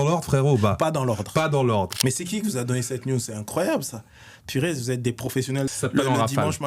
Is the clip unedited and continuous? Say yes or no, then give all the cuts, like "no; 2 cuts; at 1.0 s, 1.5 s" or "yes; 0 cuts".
no; 2 cuts; at 1.9 s, 5.7 s